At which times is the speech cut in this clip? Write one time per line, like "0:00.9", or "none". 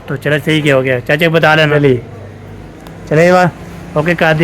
0:01.7